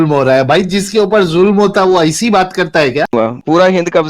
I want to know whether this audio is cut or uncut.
cut